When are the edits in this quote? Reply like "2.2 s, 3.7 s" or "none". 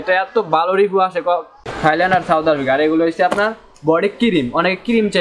1.6 s